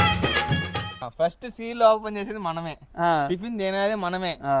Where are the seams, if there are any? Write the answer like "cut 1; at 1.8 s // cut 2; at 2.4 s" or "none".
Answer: cut 1; at 1.1 s